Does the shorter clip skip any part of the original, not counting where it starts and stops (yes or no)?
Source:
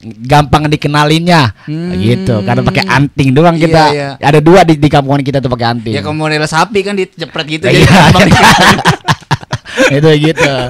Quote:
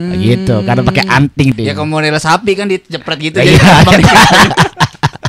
yes